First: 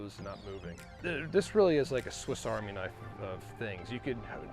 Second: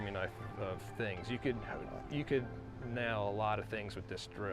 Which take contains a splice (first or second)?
first